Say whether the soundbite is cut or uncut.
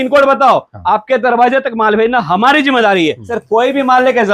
cut